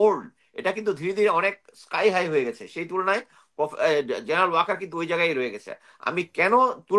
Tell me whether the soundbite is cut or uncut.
uncut